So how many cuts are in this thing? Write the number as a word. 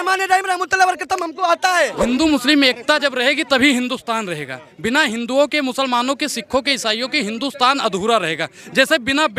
one